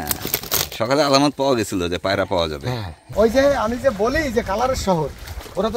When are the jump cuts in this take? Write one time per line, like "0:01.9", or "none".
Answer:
0:03.0